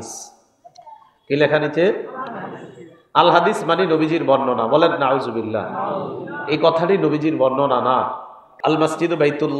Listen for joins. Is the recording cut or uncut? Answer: cut